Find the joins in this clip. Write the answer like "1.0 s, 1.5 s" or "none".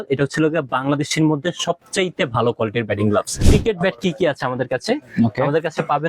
3.4 s